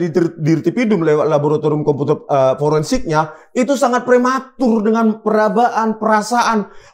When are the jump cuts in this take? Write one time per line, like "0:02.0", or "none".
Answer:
none

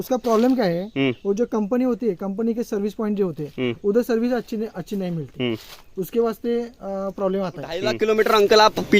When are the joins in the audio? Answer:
0:07.9

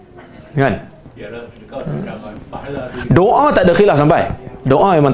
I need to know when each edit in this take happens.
0:02.4

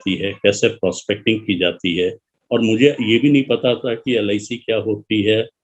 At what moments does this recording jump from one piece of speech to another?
0:02.3

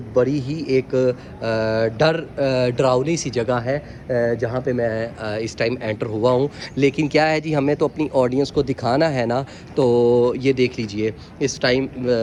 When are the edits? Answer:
none

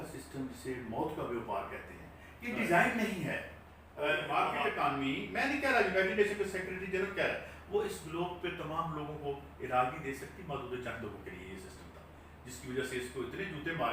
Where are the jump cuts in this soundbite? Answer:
0:04.5

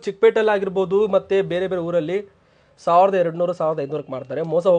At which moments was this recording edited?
none

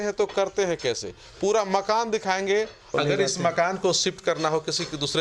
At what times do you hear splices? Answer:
0:02.9

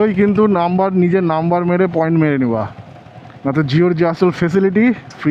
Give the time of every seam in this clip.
none

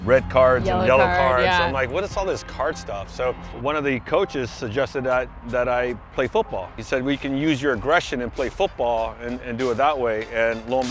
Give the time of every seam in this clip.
0:03.5
0:06.8

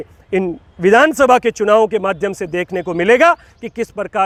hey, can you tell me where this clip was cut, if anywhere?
none

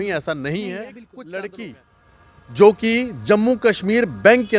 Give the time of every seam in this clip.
0:01.0

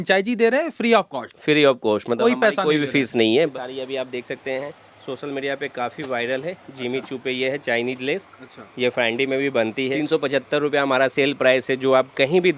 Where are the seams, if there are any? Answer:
0:03.5
0:09.9

